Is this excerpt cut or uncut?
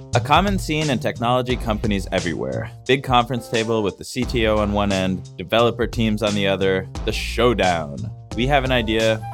cut